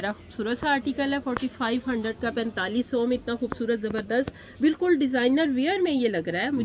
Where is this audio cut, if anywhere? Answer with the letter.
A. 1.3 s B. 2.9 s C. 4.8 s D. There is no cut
D